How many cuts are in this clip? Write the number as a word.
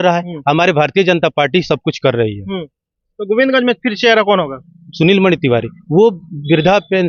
zero